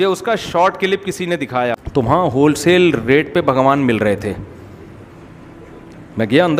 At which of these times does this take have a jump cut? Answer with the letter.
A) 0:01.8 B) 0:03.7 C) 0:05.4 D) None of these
A